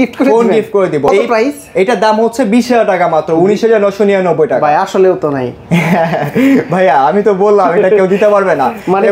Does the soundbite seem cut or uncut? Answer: uncut